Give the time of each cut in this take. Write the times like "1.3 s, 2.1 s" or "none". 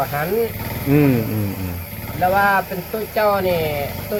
none